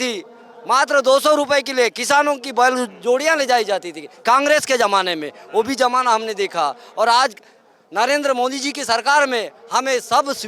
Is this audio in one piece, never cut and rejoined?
yes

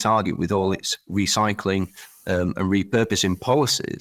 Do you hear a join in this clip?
no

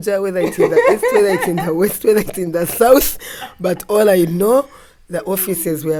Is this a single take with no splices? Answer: yes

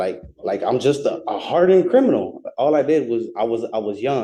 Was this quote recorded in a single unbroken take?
yes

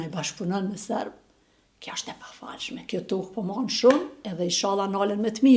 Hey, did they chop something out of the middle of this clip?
yes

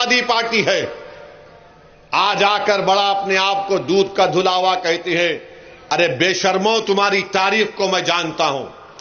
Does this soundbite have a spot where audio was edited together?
no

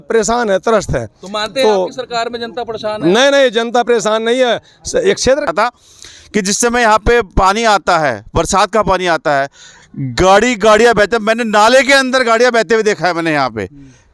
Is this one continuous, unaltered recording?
no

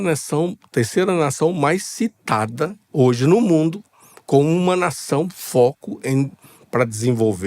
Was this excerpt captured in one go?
yes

